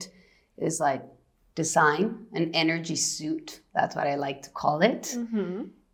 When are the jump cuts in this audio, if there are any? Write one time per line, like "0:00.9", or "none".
none